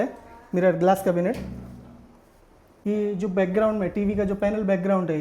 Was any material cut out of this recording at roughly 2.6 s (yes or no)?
yes